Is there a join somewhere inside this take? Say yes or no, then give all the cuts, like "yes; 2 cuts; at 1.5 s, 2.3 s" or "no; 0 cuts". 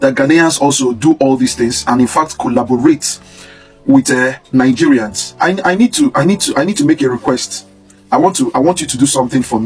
no; 0 cuts